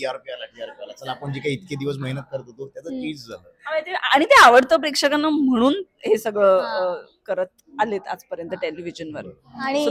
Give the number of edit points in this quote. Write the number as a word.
zero